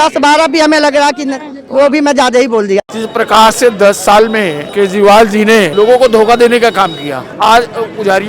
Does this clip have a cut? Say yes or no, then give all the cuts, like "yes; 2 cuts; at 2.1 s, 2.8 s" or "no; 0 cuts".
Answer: yes; 4 cuts; at 2.9 s, 4.6 s, 5.7 s, 7.3 s